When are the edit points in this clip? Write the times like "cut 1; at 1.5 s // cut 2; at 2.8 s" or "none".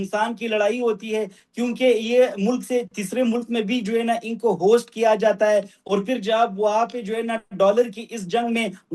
none